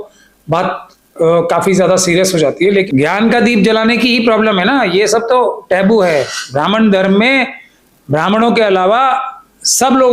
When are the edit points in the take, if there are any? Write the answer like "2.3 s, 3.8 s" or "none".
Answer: 2.9 s